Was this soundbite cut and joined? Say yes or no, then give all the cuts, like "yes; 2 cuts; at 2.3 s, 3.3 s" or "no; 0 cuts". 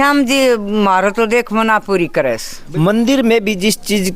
no; 0 cuts